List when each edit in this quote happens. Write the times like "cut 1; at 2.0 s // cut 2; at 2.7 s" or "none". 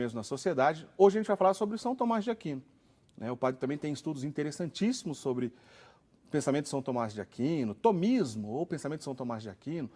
none

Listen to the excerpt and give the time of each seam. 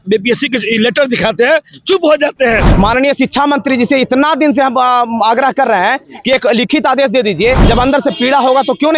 cut 1; at 2.7 s // cut 2; at 7.6 s

